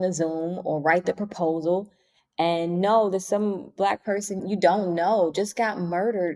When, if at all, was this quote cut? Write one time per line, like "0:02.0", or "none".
0:04.4